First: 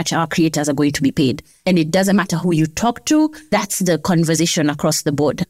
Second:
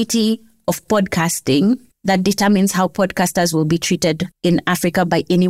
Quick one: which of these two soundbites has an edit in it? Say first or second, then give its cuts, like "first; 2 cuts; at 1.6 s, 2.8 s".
first; 2 cuts; at 1.6 s, 3.5 s